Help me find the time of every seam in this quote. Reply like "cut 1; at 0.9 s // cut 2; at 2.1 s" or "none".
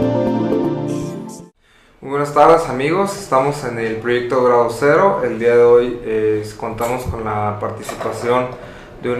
none